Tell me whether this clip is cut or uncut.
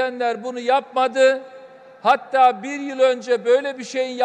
uncut